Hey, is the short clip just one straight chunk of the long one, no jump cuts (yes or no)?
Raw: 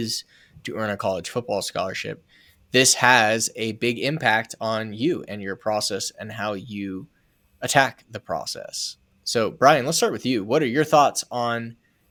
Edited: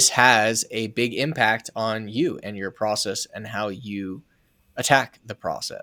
yes